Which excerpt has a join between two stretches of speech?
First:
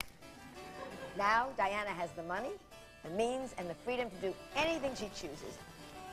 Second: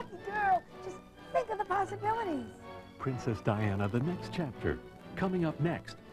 first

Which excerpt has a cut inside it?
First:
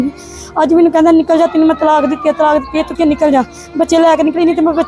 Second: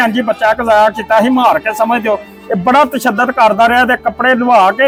first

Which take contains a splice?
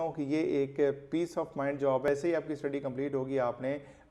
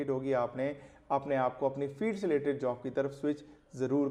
first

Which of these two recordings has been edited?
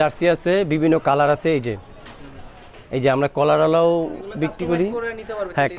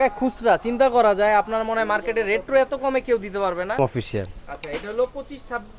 second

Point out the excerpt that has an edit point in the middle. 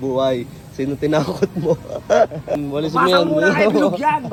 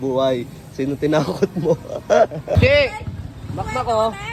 second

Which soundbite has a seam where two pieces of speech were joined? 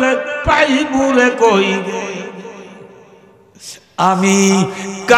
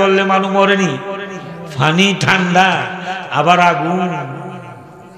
first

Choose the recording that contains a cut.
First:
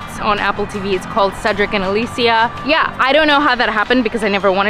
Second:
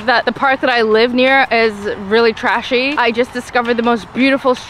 first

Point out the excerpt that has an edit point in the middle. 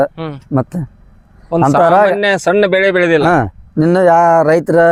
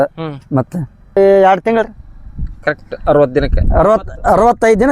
second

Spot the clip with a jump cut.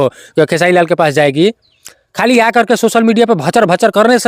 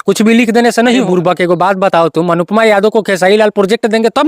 second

